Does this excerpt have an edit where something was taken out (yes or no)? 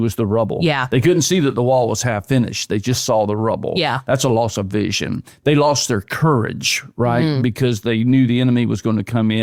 no